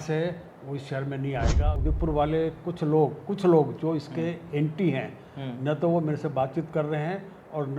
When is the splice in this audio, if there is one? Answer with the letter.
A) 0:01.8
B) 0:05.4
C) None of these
A